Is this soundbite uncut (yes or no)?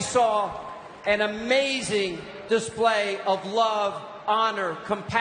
no